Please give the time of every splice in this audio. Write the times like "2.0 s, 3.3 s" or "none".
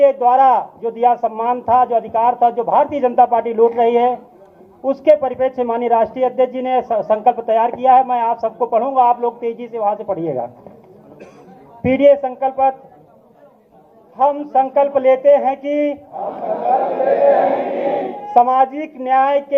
6.9 s

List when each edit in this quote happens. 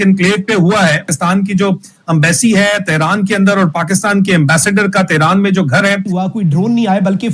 1.1 s, 6.1 s

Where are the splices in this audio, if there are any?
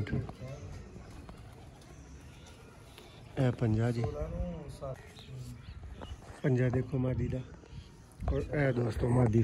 5.0 s

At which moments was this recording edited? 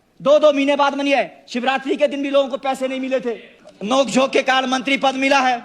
3.5 s

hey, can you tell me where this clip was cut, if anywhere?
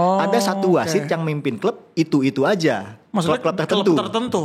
none

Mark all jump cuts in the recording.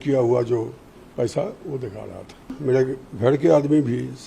2.6 s

